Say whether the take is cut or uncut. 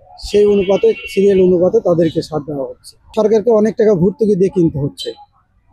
cut